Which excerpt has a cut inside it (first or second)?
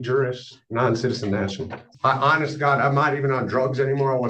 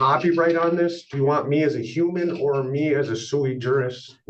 first